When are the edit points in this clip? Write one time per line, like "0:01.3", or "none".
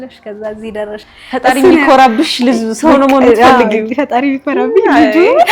0:01.1